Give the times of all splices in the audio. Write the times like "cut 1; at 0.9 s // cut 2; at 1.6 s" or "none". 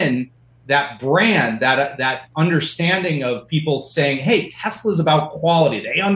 none